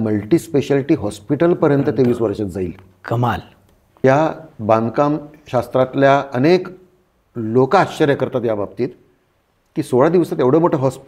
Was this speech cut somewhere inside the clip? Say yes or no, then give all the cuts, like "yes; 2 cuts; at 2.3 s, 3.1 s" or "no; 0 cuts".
yes; 1 cut; at 4.0 s